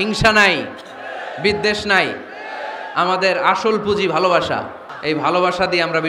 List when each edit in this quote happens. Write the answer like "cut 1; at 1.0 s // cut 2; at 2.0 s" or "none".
cut 1; at 4.8 s